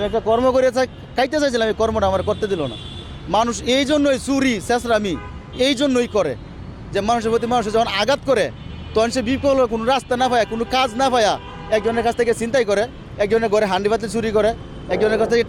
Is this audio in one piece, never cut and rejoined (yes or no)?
yes